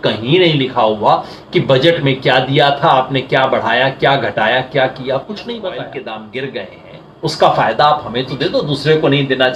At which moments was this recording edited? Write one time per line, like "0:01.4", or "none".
0:05.9